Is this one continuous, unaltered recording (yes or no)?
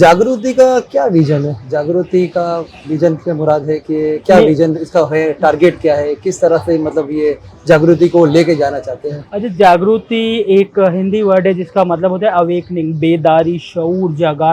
yes